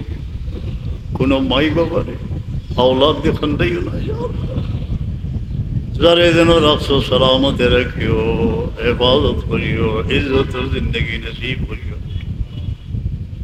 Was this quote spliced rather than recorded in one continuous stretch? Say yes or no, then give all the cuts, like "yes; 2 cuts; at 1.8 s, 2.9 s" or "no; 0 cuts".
no; 0 cuts